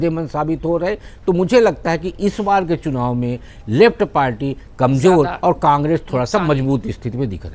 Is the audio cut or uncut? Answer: uncut